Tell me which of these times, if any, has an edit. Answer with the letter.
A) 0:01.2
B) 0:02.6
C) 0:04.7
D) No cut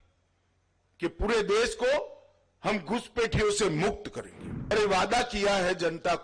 C